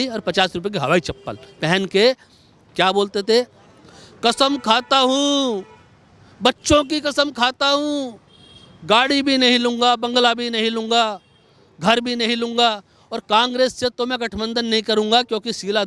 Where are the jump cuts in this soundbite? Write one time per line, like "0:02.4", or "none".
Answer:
none